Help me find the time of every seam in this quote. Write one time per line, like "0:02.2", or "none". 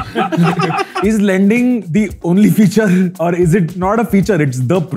0:00.9
0:01.8
0:03.5